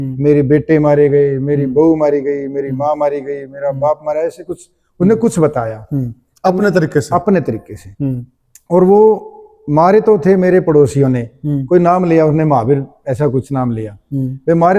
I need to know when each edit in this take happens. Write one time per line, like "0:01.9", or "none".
none